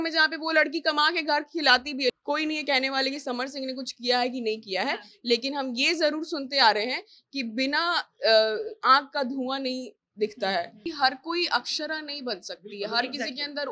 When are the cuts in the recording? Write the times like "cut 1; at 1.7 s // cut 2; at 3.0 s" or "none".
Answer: cut 1; at 2.1 s // cut 2; at 10.8 s